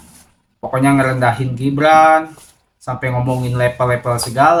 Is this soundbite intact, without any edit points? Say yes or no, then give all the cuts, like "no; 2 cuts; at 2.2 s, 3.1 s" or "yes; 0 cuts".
yes; 0 cuts